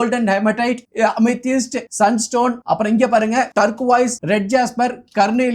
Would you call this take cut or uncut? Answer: cut